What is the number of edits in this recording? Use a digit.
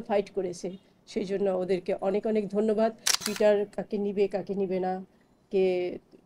1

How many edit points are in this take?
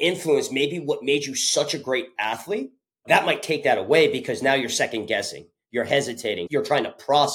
1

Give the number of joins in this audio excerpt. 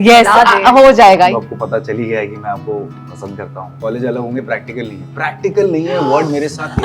2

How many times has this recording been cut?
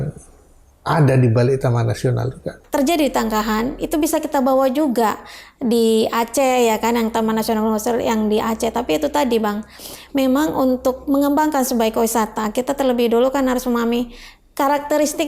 1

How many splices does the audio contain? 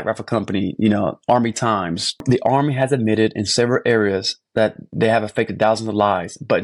1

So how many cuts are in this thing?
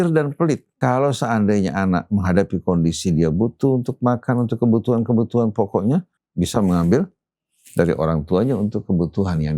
2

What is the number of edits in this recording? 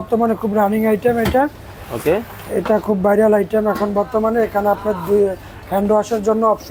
0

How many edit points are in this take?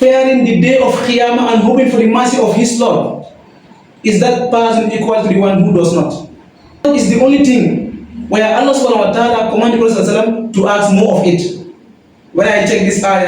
1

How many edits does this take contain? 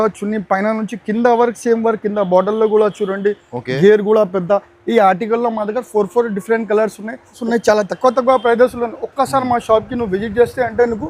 1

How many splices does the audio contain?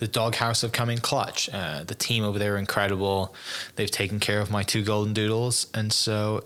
0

